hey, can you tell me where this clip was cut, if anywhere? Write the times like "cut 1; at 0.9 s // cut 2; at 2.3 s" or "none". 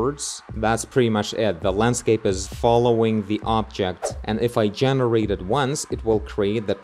cut 1; at 2.5 s // cut 2; at 4.1 s